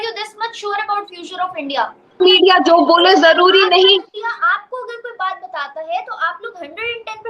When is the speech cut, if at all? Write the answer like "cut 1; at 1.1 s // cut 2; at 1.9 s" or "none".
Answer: cut 1; at 2.1 s